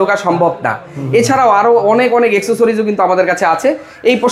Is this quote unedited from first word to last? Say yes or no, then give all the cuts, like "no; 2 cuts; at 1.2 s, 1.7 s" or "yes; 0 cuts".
yes; 0 cuts